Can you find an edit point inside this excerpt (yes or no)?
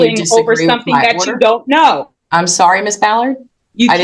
no